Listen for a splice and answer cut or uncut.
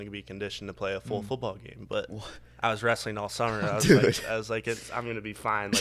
uncut